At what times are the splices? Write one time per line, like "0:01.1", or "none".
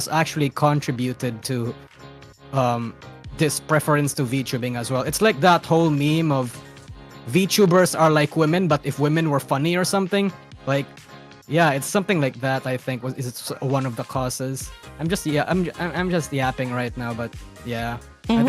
none